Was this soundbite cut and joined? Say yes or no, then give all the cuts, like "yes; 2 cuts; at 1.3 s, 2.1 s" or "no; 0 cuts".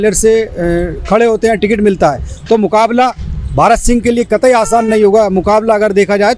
no; 0 cuts